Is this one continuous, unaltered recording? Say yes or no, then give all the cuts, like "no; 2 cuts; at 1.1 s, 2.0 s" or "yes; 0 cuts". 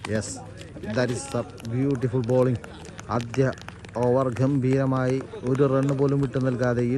yes; 0 cuts